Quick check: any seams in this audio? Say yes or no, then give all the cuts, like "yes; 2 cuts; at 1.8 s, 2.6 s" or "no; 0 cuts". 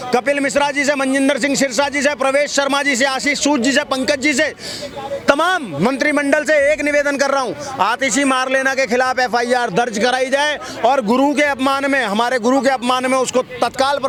no; 0 cuts